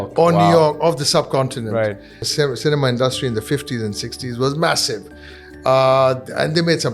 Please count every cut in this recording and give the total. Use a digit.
1